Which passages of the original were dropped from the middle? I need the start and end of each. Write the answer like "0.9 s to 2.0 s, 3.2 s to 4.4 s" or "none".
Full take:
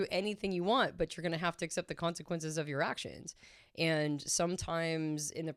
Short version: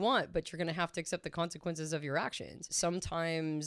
3.4 s to 4.3 s